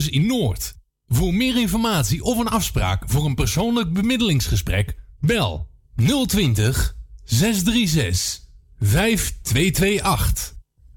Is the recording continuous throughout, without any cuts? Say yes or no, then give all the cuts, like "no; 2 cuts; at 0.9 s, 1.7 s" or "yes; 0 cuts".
yes; 0 cuts